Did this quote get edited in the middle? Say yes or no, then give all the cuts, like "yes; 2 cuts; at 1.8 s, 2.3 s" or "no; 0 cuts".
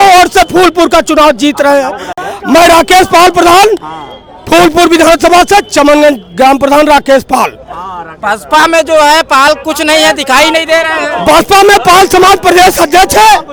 no; 0 cuts